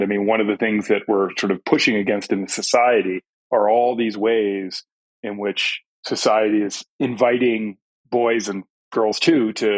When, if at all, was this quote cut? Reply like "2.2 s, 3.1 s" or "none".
3.4 s, 6.8 s